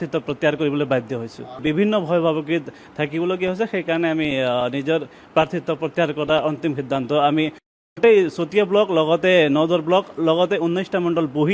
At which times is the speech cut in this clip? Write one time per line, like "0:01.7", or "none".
0:01.6